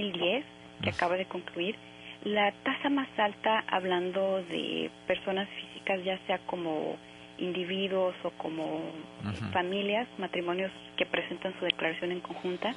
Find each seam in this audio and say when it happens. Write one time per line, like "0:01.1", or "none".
0:02.6